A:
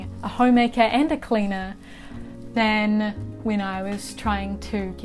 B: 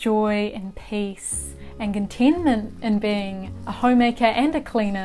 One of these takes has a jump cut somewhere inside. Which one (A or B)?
A